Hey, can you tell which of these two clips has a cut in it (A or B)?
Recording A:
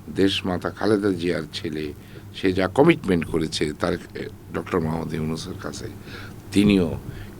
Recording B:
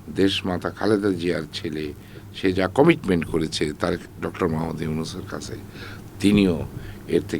B